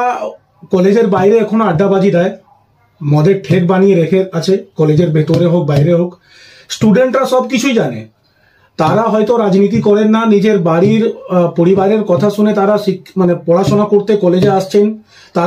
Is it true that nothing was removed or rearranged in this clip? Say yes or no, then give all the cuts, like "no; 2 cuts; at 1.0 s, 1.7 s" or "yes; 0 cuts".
yes; 0 cuts